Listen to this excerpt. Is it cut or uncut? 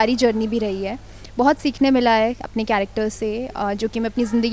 uncut